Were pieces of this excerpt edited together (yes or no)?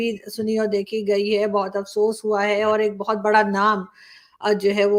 no